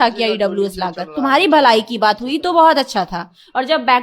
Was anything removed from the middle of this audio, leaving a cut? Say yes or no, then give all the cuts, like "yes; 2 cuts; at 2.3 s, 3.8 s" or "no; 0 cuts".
yes; 1 cut; at 1.1 s